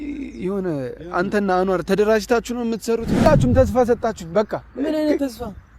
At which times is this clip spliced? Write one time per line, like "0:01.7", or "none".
0:03.3